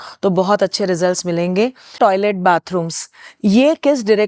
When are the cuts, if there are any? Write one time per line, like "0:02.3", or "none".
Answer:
0:02.0